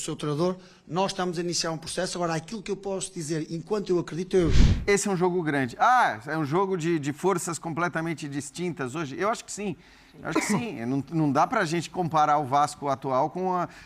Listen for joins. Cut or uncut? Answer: cut